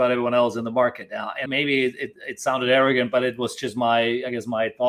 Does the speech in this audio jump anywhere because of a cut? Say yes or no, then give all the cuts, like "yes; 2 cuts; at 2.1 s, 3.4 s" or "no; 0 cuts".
yes; 1 cut; at 1.4 s